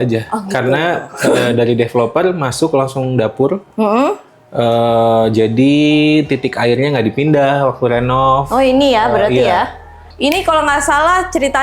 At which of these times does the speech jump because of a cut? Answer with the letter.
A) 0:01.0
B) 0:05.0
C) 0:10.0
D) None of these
C